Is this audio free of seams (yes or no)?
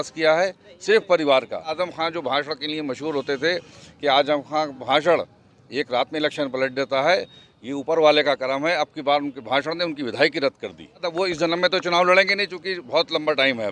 no